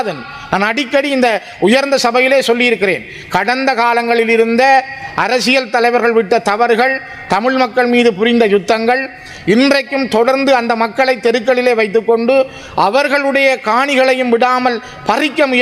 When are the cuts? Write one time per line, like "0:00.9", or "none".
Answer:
none